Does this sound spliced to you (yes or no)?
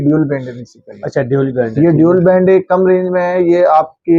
no